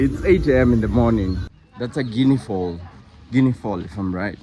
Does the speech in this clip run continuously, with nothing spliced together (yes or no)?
no